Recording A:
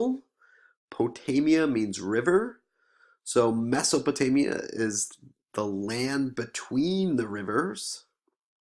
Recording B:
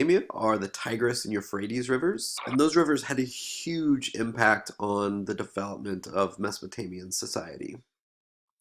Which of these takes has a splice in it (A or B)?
A